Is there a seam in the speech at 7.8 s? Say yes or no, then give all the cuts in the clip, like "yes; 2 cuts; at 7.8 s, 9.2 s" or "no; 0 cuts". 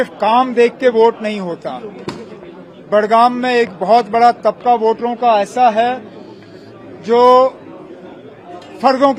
no; 0 cuts